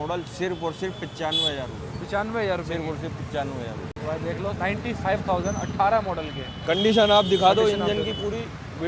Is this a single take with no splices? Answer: yes; 0 cuts

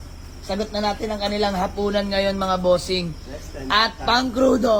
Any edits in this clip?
no; 0 cuts

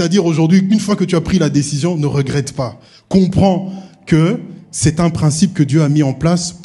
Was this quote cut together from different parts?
no; 0 cuts

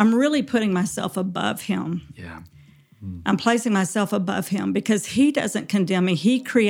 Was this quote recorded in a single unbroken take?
yes; 0 cuts

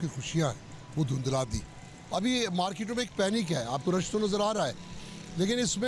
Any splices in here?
no; 0 cuts

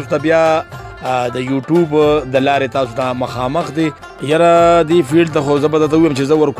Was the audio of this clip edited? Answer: yes; 1 cut; at 4.1 s

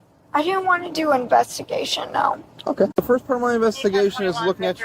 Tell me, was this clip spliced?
yes; 1 cut; at 3.0 s

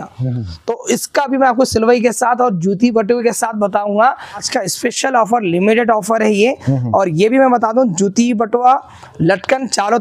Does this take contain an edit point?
yes; 1 cut; at 4.5 s

